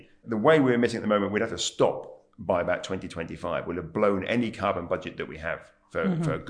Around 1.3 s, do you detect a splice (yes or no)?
no